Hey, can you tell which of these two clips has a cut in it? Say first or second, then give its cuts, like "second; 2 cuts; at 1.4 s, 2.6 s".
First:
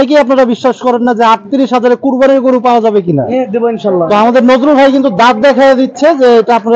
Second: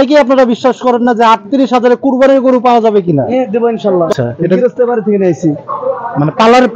second; 1 cut; at 4.1 s